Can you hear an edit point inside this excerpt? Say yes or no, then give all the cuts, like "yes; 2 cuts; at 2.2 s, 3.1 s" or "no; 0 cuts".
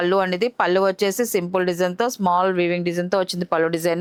no; 0 cuts